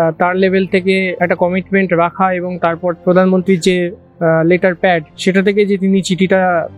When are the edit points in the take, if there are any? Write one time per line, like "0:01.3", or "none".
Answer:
0:01.1
0:03.0
0:05.1